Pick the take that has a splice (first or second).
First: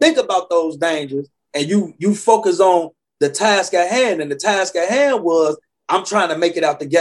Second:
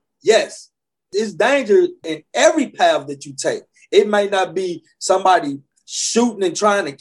second